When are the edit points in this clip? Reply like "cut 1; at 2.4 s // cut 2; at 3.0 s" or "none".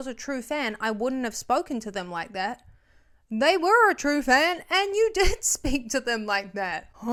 none